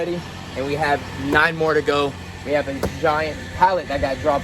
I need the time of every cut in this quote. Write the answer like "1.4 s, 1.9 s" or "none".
3.4 s